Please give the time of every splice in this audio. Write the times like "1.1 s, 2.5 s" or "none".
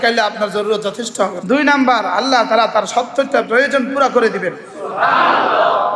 1.4 s